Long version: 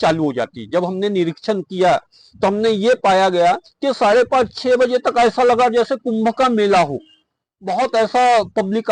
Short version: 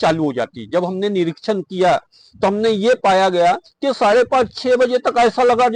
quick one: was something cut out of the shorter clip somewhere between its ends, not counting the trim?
no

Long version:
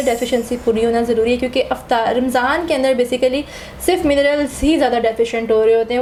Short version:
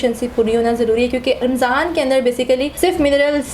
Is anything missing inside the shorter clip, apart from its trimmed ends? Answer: yes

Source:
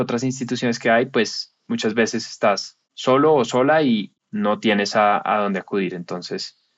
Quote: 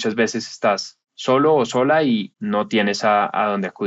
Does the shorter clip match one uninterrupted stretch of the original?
no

